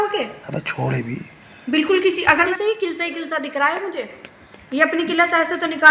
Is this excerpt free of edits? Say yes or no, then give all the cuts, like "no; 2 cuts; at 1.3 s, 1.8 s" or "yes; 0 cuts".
no; 1 cut; at 2.5 s